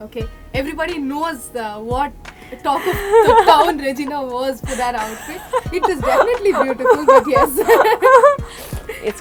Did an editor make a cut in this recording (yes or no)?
no